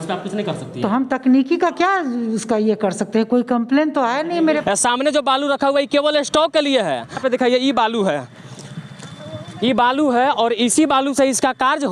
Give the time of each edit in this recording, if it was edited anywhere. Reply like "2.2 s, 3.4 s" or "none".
4.6 s, 7.2 s